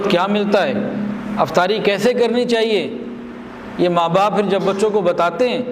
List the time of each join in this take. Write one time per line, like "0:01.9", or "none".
none